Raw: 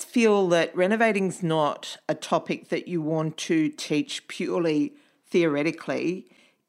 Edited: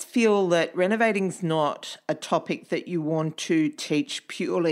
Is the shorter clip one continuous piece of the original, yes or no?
yes